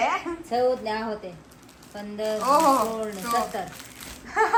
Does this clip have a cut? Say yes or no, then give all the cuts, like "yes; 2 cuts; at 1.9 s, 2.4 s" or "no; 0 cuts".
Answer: no; 0 cuts